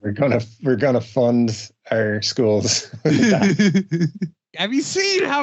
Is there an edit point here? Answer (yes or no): yes